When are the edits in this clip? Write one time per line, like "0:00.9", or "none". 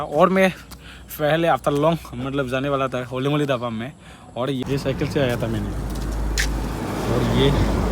0:04.6